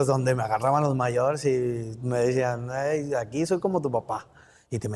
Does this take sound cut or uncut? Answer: uncut